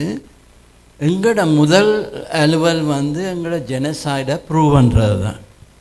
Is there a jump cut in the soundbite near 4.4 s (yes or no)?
no